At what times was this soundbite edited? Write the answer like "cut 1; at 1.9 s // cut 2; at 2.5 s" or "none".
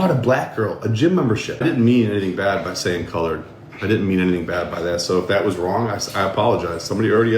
cut 1; at 1.6 s